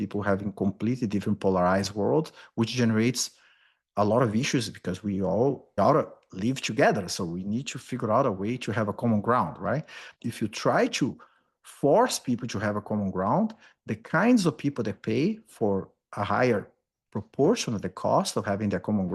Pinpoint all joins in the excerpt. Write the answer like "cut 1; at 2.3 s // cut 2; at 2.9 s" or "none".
cut 1; at 5.8 s // cut 2; at 10.2 s